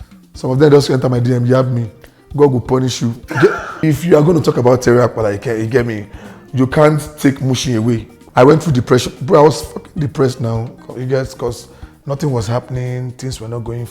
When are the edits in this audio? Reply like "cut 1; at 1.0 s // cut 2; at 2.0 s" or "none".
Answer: cut 1; at 3.8 s // cut 2; at 8.2 s